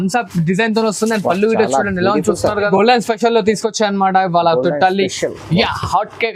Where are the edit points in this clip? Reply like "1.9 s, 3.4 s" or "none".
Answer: 2.7 s